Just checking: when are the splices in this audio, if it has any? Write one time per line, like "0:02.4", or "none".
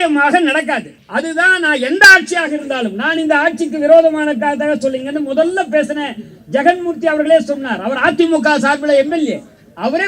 0:01.0